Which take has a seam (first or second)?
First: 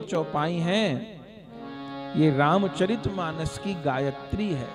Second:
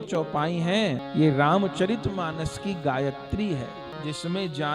second